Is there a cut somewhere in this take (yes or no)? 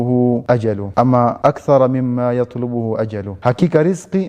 yes